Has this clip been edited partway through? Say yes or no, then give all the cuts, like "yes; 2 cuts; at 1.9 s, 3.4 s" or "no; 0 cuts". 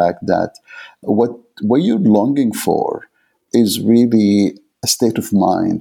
yes; 3 cuts; at 1.0 s, 3.4 s, 4.8 s